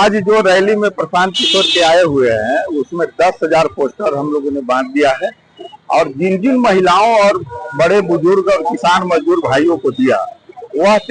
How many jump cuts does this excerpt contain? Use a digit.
0